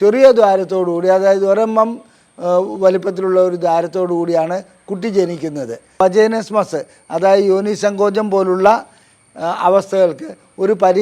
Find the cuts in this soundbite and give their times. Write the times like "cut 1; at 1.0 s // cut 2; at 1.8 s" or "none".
cut 1; at 6.0 s